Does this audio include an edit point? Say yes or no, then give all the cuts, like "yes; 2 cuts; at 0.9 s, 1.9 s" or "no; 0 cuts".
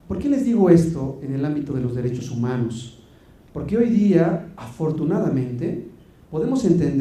no; 0 cuts